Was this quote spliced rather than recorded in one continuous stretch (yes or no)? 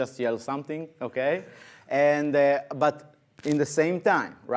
no